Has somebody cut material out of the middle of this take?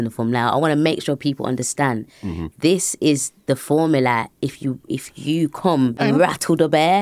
yes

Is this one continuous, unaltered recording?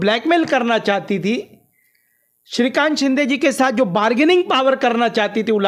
yes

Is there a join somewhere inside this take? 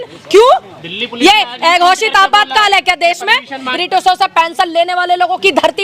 yes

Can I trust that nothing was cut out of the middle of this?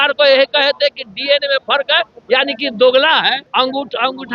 yes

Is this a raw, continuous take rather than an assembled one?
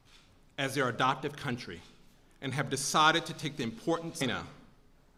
yes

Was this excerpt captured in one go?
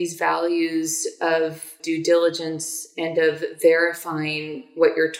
no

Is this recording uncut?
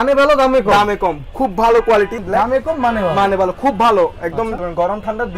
no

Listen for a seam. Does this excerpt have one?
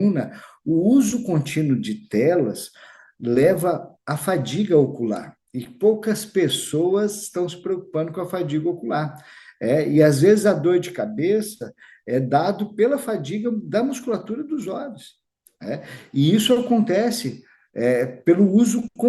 no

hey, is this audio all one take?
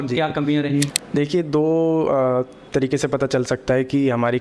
no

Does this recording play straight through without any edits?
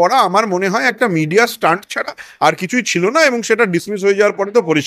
yes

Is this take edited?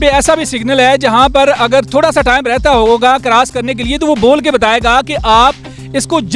no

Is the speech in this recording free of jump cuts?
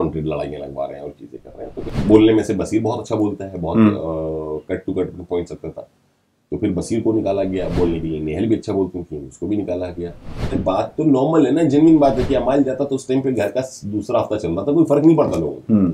no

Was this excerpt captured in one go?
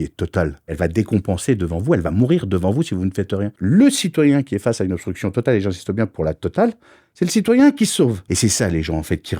no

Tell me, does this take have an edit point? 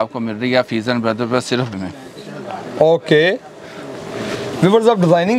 yes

